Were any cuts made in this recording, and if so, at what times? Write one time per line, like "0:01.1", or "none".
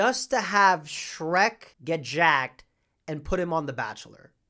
0:01.7